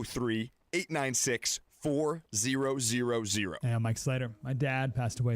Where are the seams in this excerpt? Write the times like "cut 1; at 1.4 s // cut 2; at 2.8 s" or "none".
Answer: cut 1; at 3.6 s